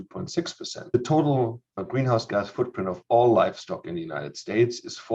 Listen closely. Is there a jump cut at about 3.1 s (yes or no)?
no